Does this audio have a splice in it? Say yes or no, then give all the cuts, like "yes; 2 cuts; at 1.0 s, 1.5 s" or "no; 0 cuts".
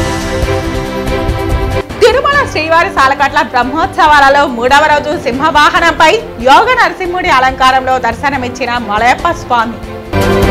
no; 0 cuts